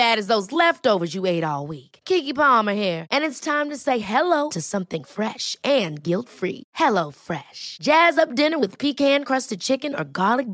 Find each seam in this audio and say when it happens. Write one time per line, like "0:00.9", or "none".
none